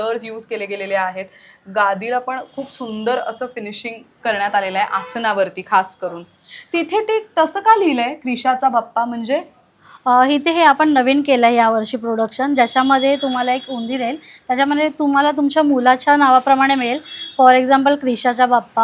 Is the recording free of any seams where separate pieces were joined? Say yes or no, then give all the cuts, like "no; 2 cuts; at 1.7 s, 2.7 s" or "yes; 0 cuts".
yes; 0 cuts